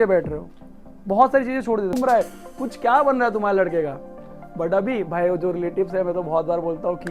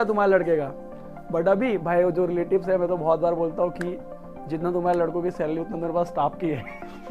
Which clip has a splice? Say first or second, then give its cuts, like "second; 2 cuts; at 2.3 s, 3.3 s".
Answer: first; 1 cut; at 1.9 s